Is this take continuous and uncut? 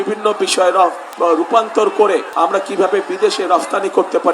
no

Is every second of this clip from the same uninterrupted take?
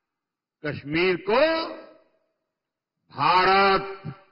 yes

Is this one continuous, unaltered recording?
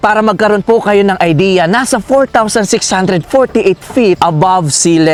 yes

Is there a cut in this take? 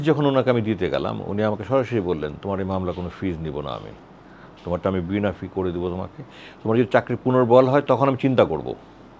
no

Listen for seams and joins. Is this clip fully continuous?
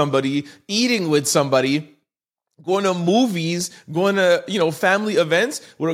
yes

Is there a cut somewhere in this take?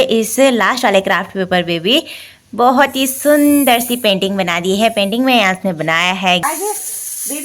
yes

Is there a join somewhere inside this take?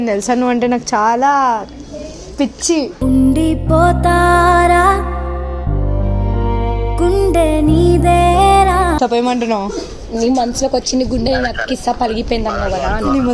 no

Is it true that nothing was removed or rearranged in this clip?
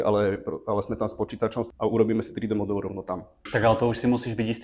no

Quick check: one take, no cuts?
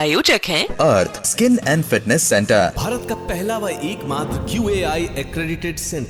yes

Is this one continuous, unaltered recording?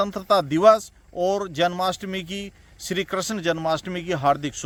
yes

